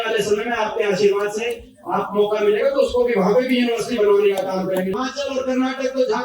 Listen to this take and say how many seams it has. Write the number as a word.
one